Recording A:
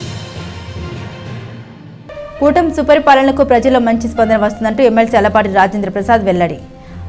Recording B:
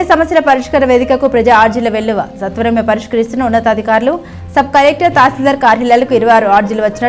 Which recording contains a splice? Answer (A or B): A